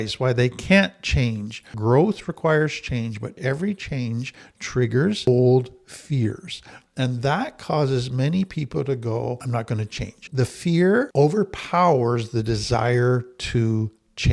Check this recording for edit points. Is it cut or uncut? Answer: cut